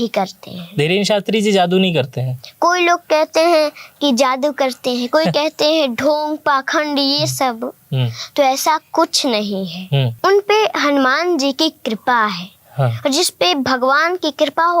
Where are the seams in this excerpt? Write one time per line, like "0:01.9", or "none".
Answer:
0:10.1